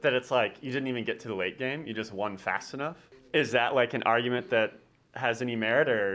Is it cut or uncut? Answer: cut